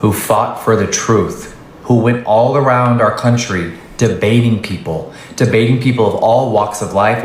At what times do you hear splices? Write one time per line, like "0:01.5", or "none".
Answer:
none